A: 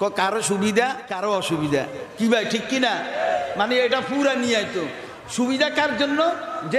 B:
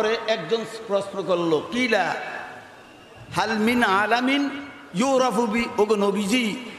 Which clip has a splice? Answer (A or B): A